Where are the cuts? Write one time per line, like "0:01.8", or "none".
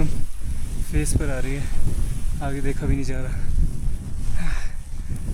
none